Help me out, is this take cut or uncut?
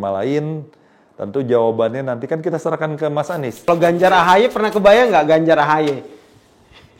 cut